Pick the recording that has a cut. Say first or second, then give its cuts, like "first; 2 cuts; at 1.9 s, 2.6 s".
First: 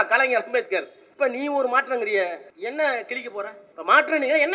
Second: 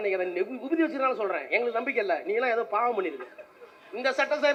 first; 3 cuts; at 1.0 s, 2.5 s, 3.6 s